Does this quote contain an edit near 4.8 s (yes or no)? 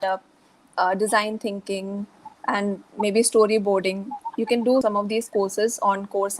yes